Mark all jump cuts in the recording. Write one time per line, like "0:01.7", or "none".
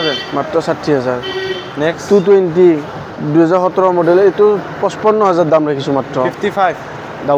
none